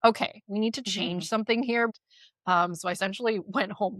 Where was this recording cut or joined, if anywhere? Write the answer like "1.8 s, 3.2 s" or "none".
2.0 s

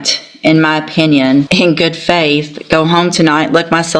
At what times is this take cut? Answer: 1.5 s

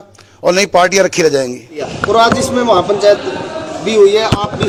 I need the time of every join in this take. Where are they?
none

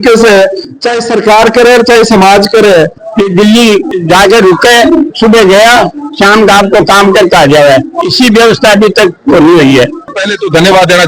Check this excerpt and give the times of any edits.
3.0 s, 10.1 s

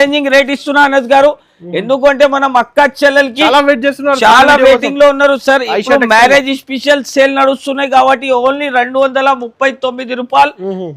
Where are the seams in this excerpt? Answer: none

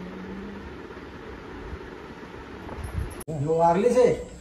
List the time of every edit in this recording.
3.3 s

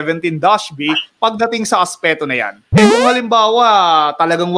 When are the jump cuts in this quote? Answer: 2.6 s

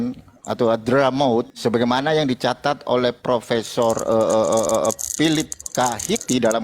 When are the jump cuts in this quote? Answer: 1.5 s

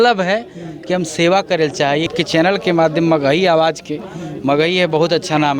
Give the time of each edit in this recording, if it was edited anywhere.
2.1 s

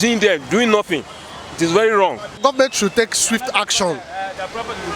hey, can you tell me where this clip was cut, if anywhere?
2.4 s

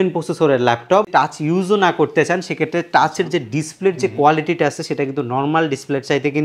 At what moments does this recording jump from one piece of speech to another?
1.1 s

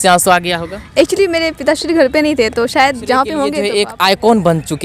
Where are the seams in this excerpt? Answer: 3.6 s

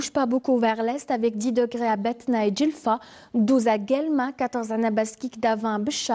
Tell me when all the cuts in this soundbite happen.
none

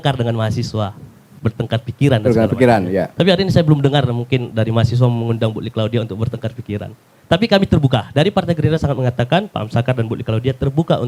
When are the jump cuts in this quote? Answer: none

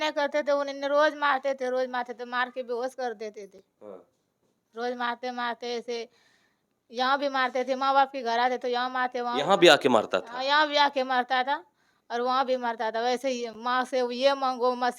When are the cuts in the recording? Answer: none

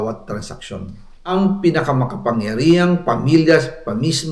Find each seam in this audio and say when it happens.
1.3 s

